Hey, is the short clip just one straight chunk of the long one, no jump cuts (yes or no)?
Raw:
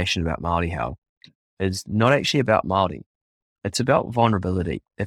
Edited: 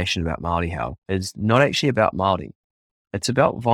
no